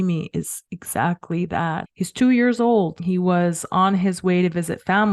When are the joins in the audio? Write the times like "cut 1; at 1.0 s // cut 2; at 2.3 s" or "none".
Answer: cut 1; at 1.9 s // cut 2; at 3.0 s